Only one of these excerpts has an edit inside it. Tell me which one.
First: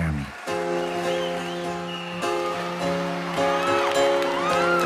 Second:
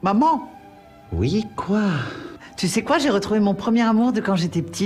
first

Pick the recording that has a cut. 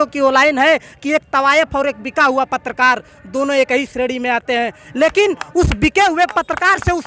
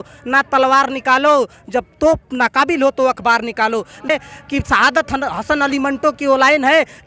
second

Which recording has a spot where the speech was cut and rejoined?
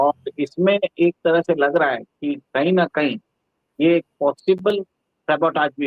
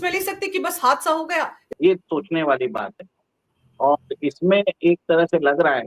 second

